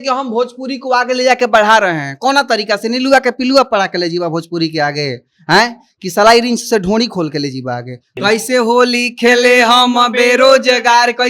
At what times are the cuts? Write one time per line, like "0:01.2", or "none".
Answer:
0:08.1